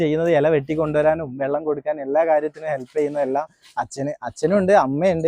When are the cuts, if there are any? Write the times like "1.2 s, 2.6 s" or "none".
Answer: none